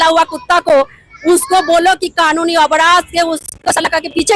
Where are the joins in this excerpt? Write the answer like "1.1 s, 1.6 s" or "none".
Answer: none